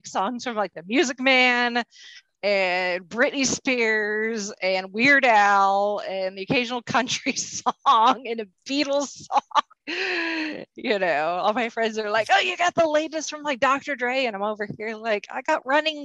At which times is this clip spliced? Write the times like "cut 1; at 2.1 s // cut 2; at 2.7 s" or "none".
cut 1; at 9.8 s